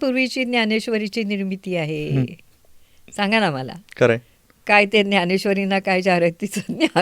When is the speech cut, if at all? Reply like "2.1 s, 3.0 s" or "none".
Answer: none